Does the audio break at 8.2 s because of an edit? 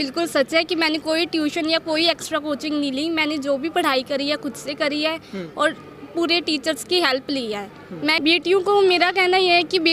yes; 1 cut; at 8.2 s

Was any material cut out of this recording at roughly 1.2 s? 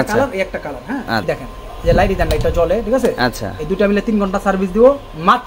yes; 1 cut; at 1.2 s

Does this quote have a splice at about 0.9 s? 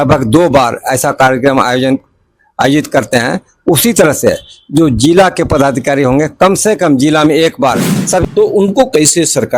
no; 1 cut; at 8.2 s

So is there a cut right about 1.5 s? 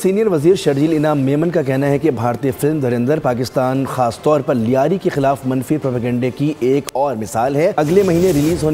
no; 1 cut; at 7.7 s

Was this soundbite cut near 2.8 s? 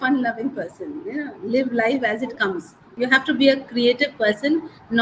yes; 1 cut; at 2.8 s

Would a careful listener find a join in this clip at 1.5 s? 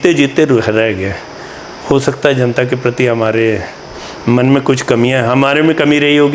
no; 0 cuts

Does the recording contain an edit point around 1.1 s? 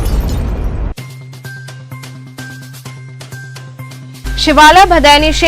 no; 1 cut; at 3.4 s

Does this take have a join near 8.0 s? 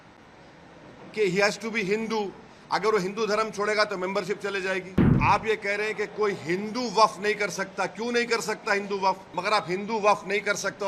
no; 2 cuts; at 5.1 s, 9.3 s

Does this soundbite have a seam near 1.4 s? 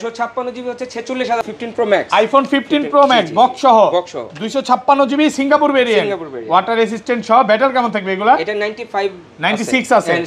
yes; 1 cut; at 1.4 s

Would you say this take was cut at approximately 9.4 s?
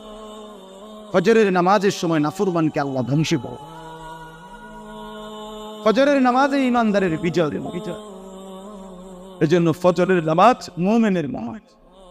yes; 3 cuts; at 1.1 s, 7.9 s, 9.4 s

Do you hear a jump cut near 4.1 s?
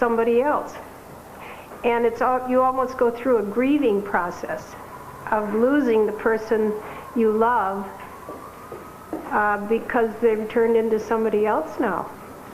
yes; 1 cut; at 4.1 s

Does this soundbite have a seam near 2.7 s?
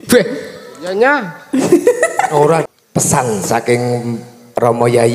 yes; 1 cut; at 2.7 s

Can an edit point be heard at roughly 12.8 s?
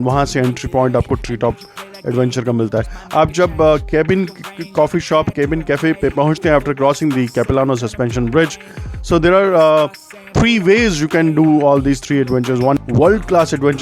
yes; 1 cut; at 12.8 s

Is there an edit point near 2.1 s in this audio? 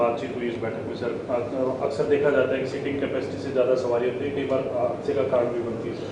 no; 0 cuts

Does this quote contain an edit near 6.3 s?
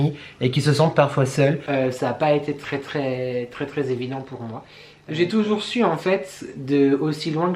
no; 1 cut; at 1.6 s

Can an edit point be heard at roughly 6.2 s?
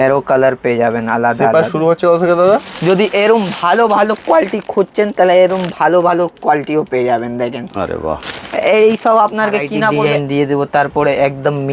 no; 2 cuts; at 2.7 s, 10.0 s

